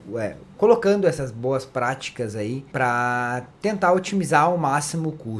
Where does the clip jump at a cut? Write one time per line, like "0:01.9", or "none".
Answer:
0:02.7
0:03.5